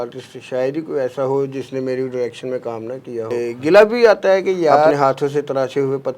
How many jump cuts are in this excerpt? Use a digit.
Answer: 2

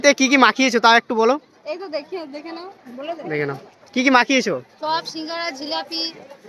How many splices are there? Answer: 0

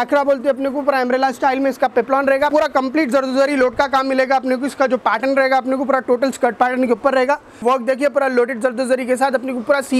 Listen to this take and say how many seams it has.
2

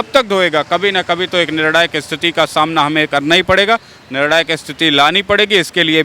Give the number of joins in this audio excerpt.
0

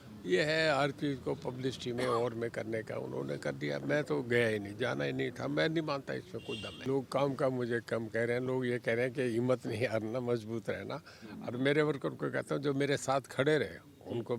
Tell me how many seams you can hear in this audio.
1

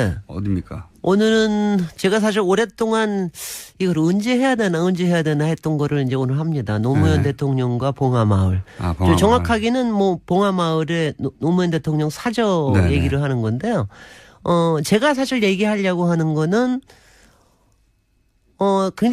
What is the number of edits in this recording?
0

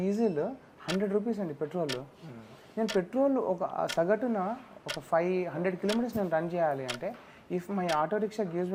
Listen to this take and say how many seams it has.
0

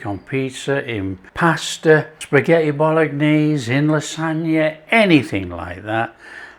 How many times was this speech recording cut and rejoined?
2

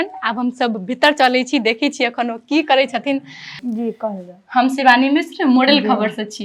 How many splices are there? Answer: 1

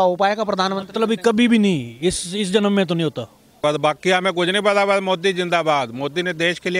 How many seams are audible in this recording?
1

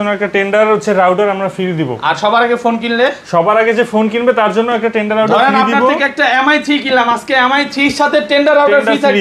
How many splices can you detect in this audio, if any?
0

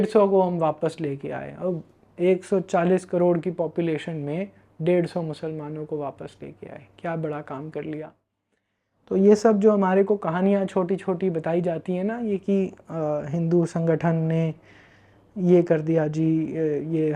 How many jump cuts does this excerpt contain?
0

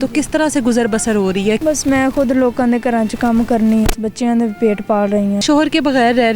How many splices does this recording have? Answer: 3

